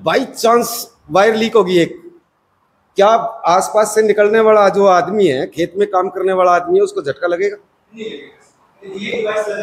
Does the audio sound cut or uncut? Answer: uncut